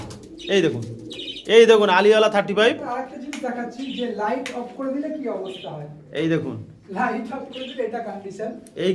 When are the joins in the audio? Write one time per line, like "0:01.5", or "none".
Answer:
0:02.9